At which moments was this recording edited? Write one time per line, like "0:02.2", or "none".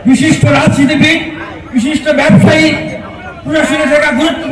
none

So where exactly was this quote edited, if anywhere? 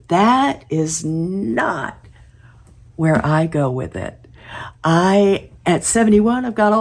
none

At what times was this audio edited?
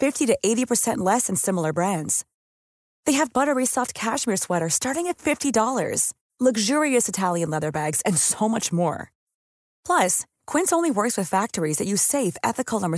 none

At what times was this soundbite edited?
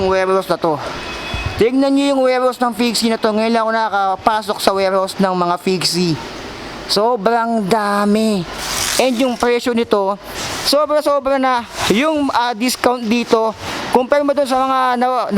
0:10.3

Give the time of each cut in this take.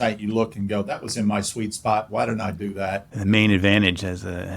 0:03.0

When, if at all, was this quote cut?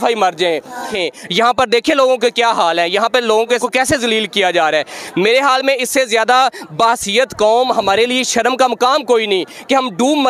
0:01.1
0:03.6

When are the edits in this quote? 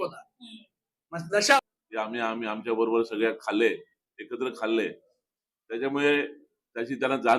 0:01.6

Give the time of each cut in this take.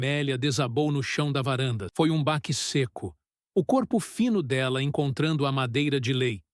0:01.8

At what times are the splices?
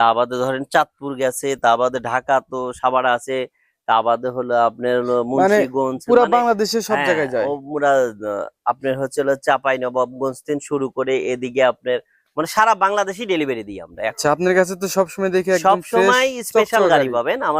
0:14.2

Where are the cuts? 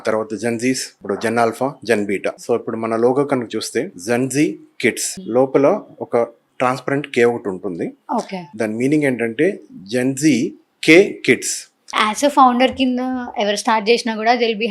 0:00.9
0:02.4
0:04.0
0:05.1
0:06.5
0:08.5
0:12.0

